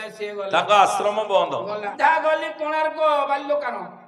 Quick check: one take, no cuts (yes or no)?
no